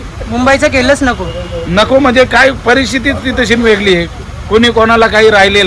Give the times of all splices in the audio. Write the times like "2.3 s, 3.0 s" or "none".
none